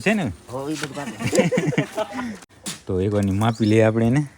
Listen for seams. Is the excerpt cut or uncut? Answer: cut